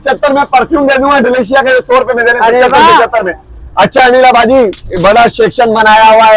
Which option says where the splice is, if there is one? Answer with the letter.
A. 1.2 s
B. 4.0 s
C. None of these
C